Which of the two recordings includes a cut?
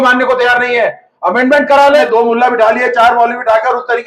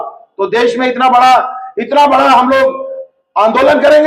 first; 1 cut; at 2.0 s

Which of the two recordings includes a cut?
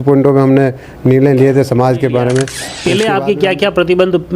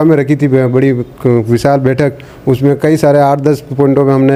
first; 1 cut; at 2.6 s

